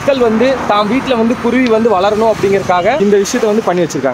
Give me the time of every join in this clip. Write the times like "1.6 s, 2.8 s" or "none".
3.0 s